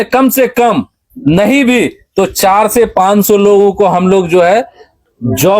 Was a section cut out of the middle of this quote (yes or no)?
no